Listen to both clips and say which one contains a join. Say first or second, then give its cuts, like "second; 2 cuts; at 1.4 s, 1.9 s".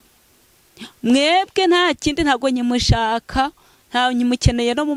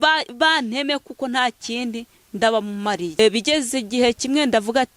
second; 1 cut; at 3.2 s